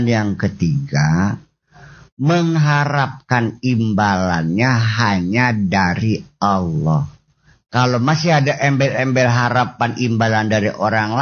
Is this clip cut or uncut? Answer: uncut